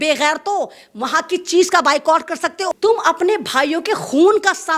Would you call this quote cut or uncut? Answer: cut